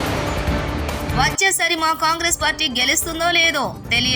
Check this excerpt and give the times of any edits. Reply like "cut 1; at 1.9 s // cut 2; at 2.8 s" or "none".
cut 1; at 1.1 s